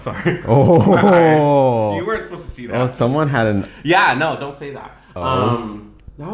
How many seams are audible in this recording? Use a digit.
0